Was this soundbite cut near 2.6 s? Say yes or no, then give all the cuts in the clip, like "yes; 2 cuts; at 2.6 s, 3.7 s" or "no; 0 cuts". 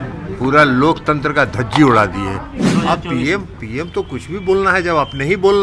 yes; 1 cut; at 2.6 s